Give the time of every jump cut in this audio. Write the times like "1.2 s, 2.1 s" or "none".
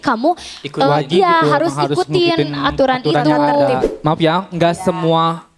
3.8 s